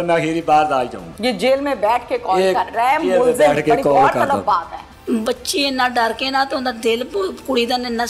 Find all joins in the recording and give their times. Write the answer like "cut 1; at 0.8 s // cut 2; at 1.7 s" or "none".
cut 1; at 1.0 s // cut 2; at 4.8 s